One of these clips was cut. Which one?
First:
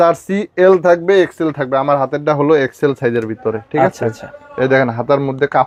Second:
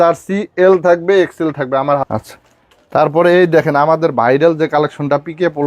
second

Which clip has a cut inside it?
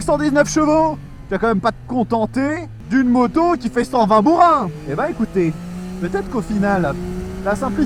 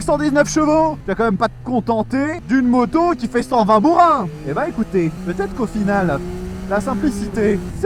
second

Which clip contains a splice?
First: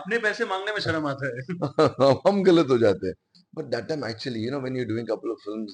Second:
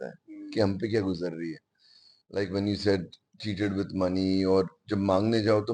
first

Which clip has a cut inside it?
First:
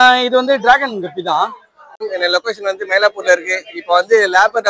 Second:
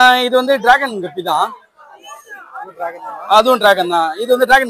first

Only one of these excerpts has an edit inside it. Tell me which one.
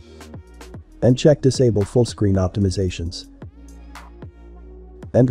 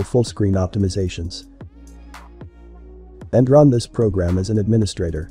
first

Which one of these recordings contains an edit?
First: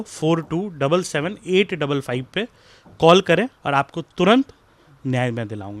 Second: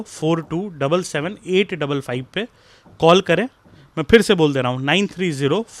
first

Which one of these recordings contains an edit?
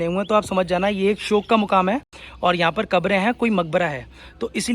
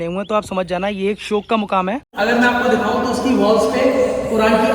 second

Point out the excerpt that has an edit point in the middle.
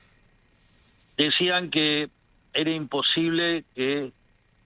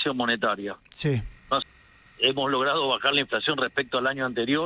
second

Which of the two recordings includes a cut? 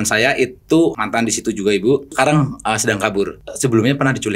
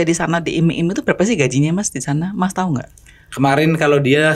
first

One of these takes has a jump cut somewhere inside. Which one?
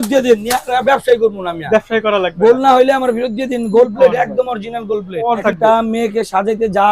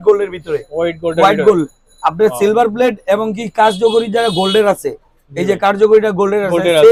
first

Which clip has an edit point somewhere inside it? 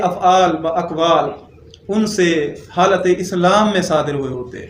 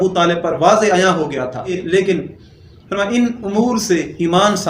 second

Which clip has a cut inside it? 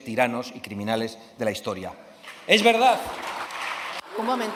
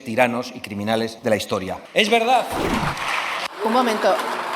second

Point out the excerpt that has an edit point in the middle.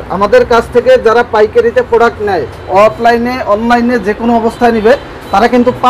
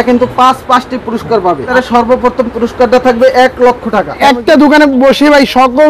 second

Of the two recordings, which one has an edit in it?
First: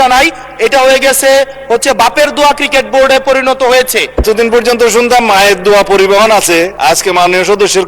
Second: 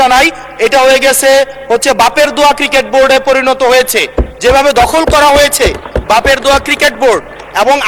first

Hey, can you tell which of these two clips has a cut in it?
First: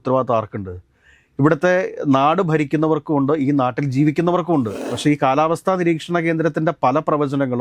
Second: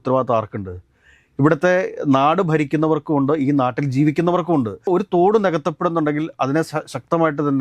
first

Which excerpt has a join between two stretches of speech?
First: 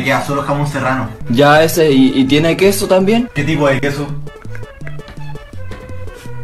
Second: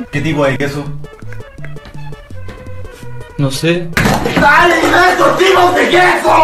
first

